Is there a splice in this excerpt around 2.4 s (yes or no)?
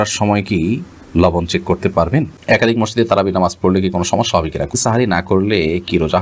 yes